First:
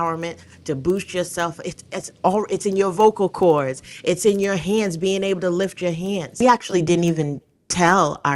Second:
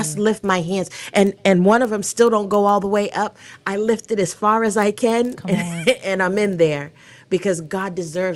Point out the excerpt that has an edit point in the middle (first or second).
first